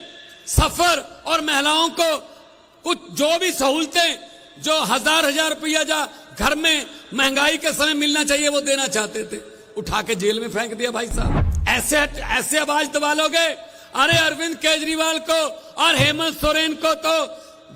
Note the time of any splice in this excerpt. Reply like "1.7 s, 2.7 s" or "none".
11.5 s